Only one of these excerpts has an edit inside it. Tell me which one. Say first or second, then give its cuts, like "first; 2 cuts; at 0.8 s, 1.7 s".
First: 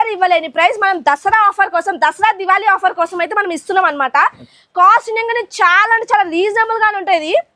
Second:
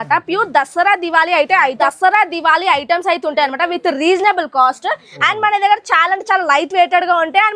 second; 1 cut; at 1.8 s